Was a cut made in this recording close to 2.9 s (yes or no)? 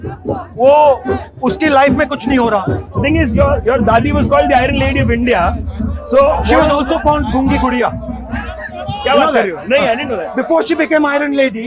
yes